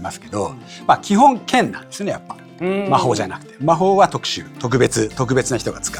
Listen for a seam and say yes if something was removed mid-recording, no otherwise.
no